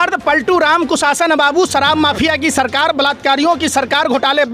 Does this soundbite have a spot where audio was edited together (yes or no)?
no